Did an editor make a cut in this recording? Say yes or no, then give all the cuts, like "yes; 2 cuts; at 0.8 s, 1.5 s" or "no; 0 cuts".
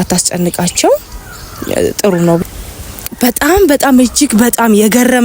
yes; 1 cut; at 2.4 s